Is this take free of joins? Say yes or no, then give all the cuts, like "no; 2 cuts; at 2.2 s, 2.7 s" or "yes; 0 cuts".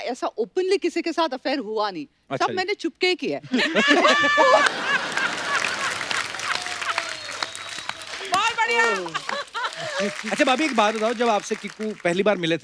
no; 1 cut; at 10.2 s